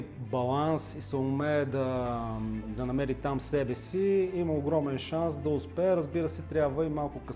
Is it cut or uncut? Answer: uncut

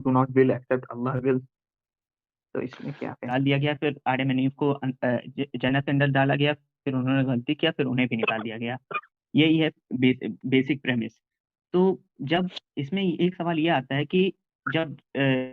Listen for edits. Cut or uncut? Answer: cut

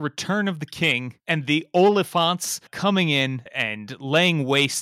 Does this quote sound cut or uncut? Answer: cut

